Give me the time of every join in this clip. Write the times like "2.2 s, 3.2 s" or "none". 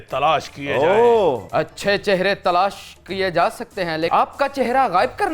1.4 s, 4.1 s